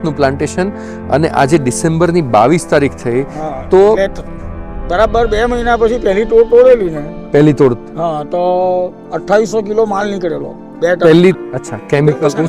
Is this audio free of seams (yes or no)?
no